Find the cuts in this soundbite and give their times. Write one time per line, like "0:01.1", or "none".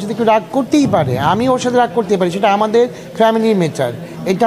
none